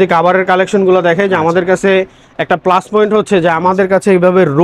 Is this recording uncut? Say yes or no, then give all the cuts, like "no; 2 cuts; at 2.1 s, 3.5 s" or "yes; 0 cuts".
yes; 0 cuts